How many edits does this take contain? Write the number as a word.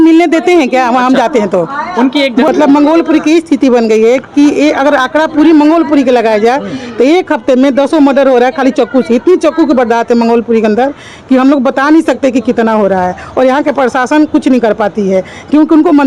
one